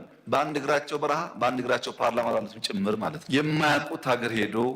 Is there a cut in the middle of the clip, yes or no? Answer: yes